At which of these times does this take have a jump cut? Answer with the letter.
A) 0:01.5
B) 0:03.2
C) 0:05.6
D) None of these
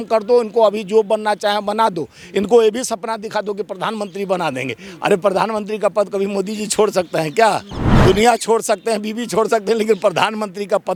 D